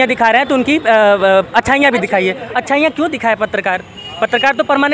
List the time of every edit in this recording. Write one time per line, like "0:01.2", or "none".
none